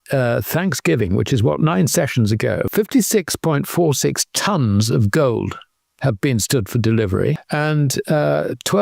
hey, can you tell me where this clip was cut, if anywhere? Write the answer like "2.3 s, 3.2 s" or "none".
2.7 s, 7.4 s